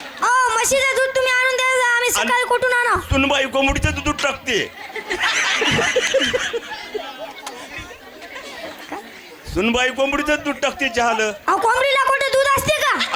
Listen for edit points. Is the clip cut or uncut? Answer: uncut